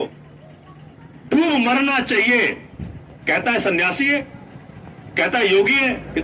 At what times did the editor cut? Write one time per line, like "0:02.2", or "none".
none